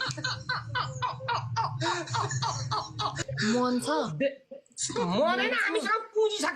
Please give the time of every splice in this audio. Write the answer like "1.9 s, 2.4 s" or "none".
3.2 s

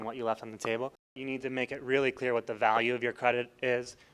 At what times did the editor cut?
1.1 s

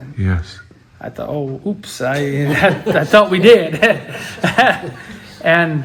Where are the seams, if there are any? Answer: none

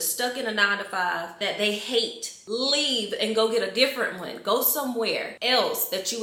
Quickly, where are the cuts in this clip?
none

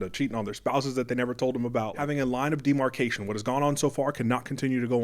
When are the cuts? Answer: 2.0 s

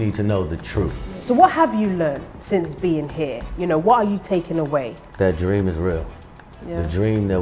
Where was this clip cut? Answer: 1.1 s, 5.0 s

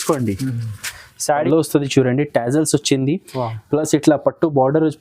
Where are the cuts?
1.3 s

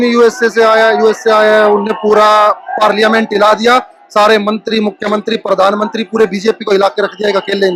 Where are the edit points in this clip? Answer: none

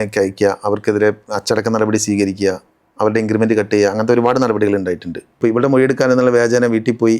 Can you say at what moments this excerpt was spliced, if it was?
5.4 s

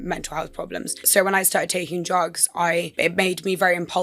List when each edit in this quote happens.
1.0 s, 2.9 s

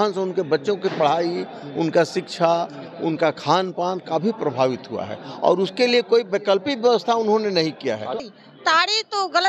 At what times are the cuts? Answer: 8.2 s

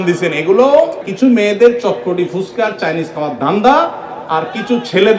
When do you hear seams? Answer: 1.0 s

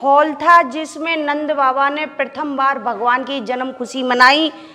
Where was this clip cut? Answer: none

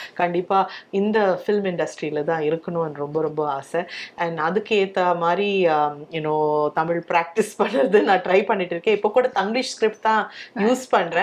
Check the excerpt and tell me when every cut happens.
none

